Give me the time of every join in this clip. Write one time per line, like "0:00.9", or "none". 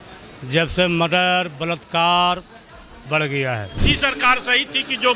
0:03.7